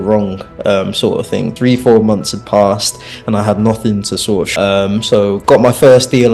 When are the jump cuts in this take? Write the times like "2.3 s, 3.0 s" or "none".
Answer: 1.5 s, 4.5 s